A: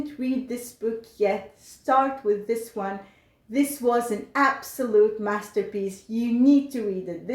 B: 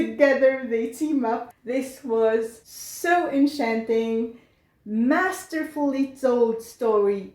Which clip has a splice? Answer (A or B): B